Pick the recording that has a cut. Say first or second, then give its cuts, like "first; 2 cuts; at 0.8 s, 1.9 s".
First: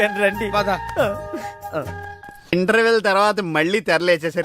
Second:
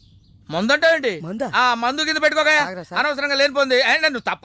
first; 1 cut; at 2.5 s